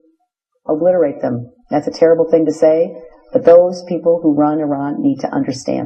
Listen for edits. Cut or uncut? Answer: cut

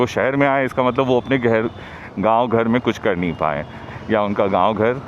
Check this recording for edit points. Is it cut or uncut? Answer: uncut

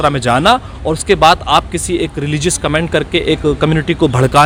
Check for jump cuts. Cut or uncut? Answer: uncut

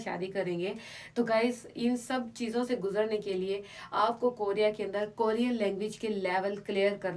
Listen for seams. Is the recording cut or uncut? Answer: uncut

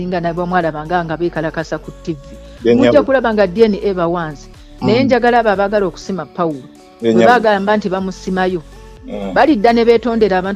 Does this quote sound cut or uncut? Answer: uncut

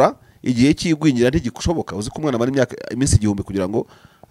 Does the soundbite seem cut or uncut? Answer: uncut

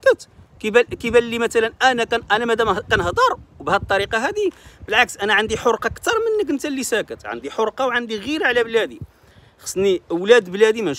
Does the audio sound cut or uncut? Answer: uncut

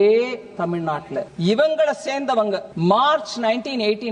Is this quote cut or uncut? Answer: cut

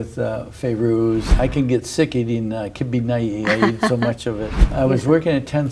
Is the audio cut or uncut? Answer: cut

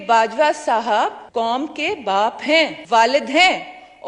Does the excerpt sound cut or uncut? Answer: cut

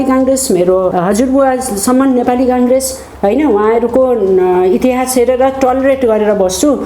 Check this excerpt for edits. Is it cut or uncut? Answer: cut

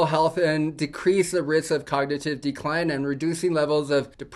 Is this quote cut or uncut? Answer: uncut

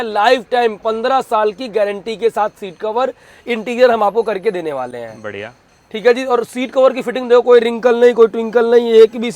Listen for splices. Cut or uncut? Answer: uncut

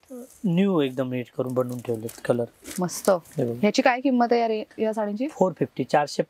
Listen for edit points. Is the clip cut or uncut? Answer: uncut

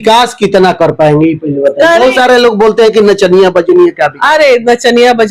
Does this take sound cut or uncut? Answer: uncut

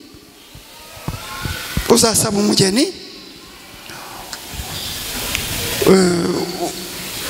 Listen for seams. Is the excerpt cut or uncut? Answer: uncut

